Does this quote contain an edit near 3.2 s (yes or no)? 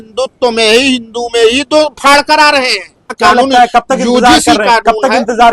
yes